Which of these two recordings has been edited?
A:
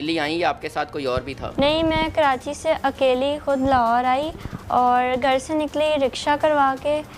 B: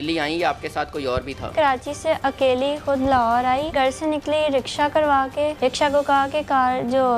B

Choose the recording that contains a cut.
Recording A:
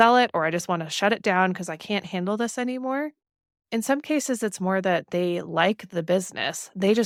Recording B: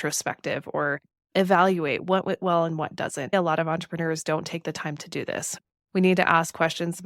B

